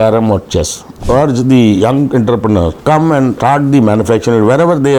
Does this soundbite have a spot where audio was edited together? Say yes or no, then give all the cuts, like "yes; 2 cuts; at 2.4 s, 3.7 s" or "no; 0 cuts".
yes; 2 cuts; at 0.9 s, 3.3 s